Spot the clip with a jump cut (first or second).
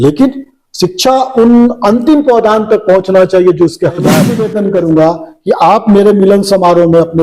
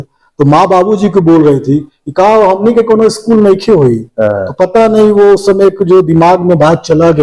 first